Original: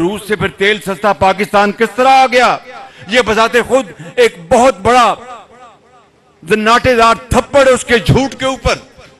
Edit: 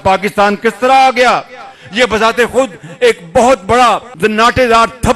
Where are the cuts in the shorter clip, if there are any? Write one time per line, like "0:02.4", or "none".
0:04.1